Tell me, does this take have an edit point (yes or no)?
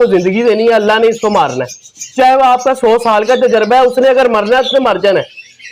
no